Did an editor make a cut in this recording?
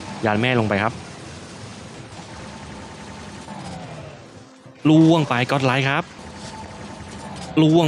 yes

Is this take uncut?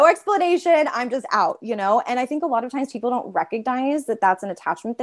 yes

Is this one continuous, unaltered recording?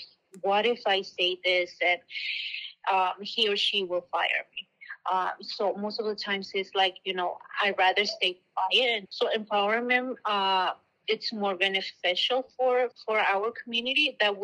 no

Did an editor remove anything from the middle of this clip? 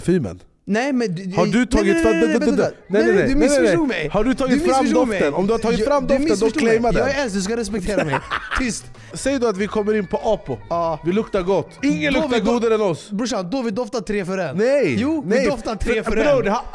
yes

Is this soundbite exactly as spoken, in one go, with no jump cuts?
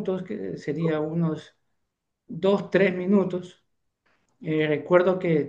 yes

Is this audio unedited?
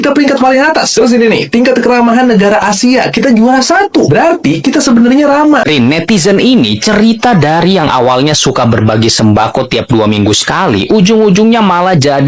no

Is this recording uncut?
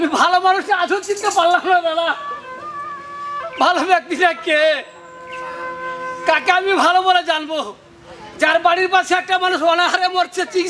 yes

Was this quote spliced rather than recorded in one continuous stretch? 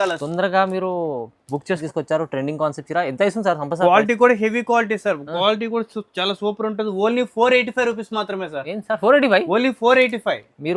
yes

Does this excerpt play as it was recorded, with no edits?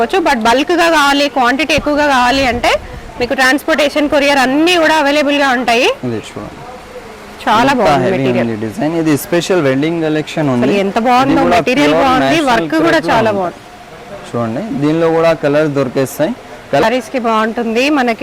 no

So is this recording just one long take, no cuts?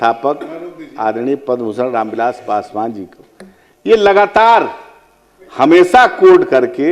yes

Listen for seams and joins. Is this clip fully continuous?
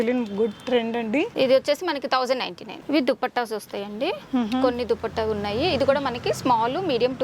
yes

